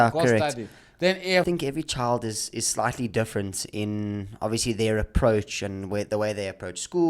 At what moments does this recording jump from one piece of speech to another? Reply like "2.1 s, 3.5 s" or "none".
1.5 s